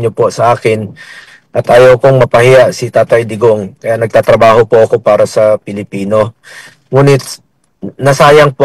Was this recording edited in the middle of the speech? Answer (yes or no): no